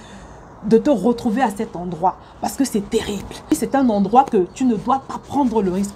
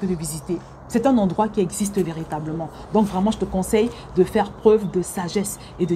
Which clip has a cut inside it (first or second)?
first